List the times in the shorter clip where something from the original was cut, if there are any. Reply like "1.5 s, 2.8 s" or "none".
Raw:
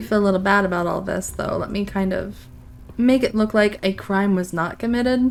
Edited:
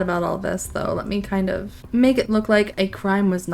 1.7 s